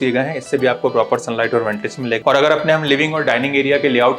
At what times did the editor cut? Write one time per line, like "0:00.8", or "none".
0:02.2